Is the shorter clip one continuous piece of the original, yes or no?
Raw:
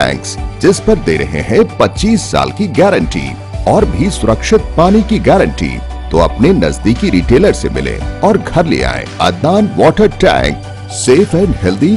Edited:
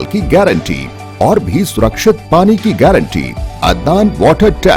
no